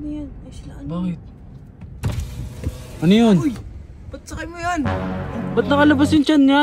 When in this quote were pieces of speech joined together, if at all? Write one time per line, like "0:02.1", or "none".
0:05.4